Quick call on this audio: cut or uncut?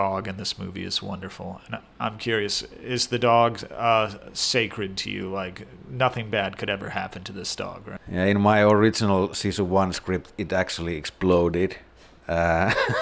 uncut